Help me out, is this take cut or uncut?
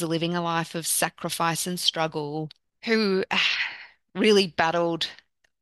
cut